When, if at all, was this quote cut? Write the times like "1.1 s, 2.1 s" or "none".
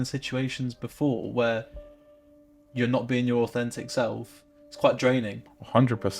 none